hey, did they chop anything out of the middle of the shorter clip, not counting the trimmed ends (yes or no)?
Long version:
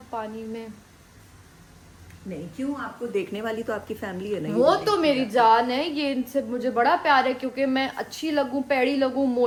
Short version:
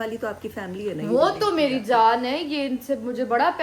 no